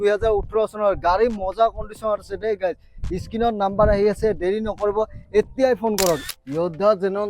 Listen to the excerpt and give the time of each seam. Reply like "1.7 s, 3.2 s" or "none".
6.3 s